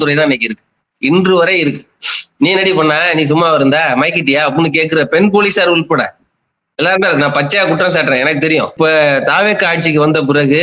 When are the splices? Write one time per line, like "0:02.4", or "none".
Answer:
0:08.7